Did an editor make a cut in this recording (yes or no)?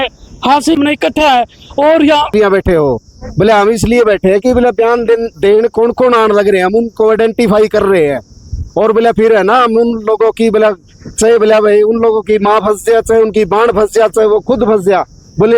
yes